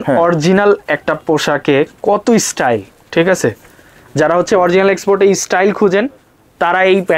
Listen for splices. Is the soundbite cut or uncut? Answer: uncut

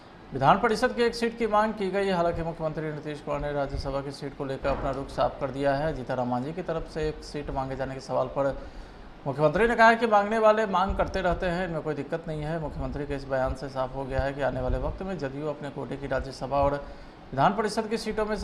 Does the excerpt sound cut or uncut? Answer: uncut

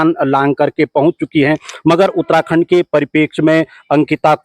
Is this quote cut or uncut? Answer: uncut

